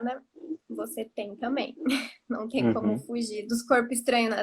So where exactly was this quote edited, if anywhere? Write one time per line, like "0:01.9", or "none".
0:03.4